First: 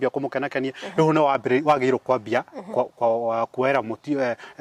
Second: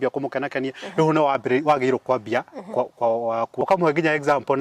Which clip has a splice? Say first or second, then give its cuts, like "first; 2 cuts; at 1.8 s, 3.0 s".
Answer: second; 1 cut; at 3.6 s